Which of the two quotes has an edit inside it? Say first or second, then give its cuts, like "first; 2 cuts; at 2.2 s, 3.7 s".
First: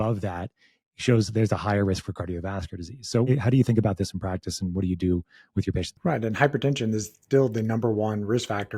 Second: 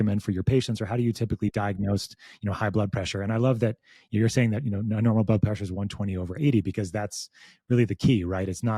first; 2 cuts; at 3.3 s, 5.9 s